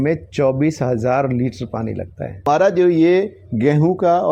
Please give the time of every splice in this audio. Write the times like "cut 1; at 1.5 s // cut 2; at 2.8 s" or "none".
cut 1; at 2.4 s